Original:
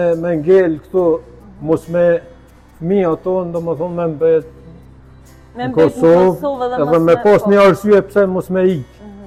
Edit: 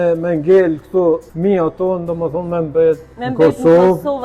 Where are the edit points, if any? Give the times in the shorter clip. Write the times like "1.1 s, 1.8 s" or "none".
1.3 s, 3.2 s